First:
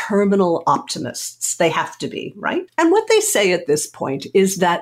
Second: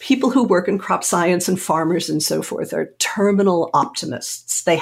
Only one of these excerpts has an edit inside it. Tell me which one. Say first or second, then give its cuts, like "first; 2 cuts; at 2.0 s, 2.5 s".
first; 1 cut; at 2.7 s